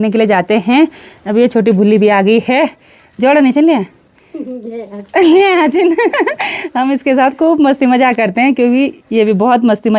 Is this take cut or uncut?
uncut